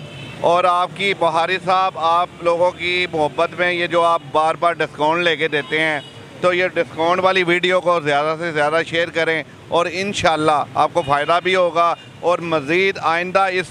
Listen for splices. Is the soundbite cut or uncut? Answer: uncut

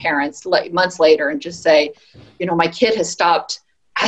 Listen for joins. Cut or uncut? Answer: uncut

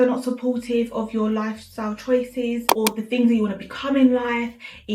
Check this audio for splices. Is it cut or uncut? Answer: cut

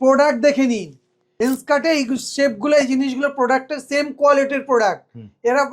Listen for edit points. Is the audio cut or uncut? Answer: cut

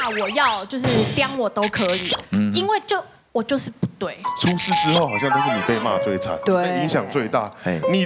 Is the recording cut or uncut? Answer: cut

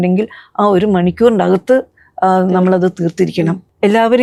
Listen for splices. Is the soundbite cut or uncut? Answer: uncut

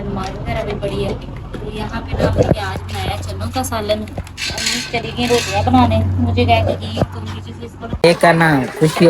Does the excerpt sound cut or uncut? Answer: cut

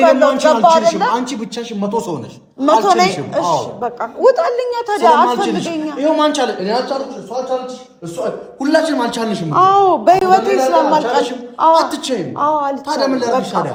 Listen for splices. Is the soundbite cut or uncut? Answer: uncut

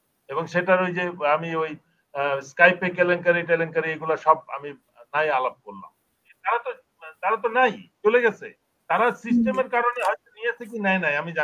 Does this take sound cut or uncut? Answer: cut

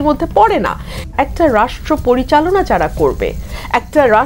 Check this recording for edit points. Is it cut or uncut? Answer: cut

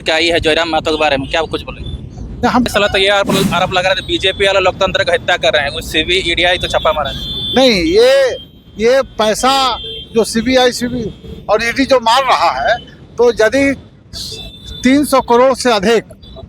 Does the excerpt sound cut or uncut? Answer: cut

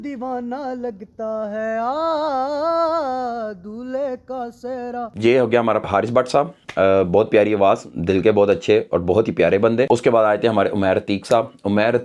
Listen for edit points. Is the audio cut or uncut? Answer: uncut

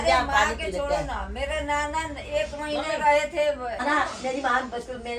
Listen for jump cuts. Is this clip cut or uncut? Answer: uncut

